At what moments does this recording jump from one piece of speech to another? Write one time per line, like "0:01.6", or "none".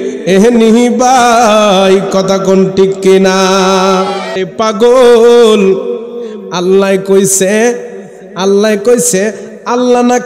0:04.4